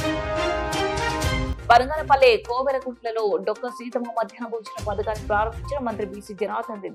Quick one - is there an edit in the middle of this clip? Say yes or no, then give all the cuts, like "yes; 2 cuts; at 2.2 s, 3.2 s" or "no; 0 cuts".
no; 0 cuts